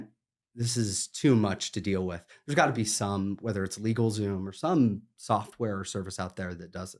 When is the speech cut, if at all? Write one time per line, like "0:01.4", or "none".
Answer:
none